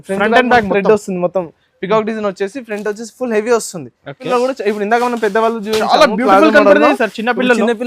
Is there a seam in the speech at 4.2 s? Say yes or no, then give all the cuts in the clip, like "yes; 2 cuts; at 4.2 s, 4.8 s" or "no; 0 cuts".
yes; 1 cut; at 4.2 s